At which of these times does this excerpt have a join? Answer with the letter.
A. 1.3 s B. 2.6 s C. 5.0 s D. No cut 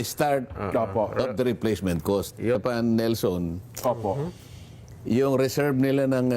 B